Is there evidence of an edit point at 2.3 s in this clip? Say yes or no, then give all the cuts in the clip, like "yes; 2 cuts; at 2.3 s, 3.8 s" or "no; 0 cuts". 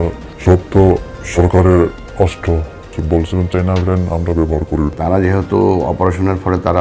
no; 1 cut; at 4.9 s